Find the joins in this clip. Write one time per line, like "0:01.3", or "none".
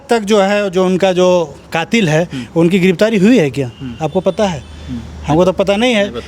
none